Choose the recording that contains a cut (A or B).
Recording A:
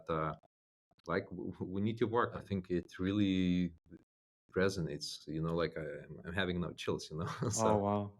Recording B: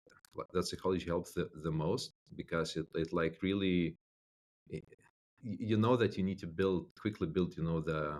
A